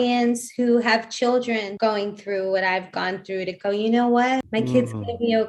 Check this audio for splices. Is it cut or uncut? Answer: cut